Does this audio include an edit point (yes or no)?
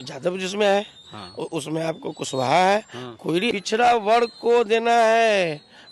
yes